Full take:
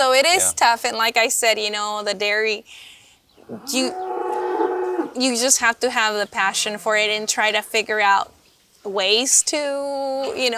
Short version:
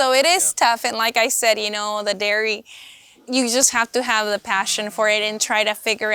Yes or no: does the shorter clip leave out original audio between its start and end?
yes